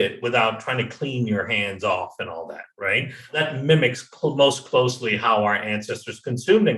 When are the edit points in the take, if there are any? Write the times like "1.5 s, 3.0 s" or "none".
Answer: 3.4 s